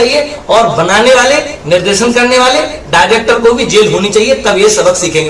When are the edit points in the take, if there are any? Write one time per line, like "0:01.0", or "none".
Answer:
none